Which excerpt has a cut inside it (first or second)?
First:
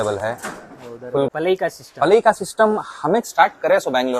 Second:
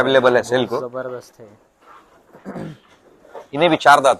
first